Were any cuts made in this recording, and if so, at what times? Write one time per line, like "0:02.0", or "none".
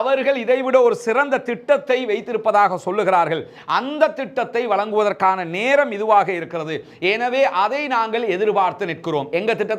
none